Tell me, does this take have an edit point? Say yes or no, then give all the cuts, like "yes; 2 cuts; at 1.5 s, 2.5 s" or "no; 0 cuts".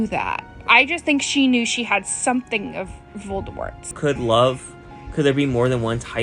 yes; 1 cut; at 3.9 s